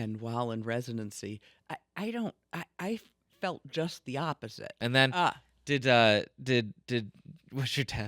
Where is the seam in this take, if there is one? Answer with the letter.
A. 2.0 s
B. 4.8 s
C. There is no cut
B